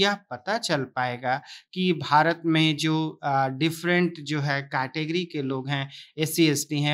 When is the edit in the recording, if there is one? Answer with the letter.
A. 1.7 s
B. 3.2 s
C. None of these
C